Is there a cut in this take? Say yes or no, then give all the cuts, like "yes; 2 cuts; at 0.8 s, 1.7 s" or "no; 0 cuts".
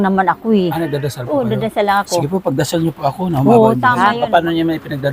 yes; 1 cut; at 3.9 s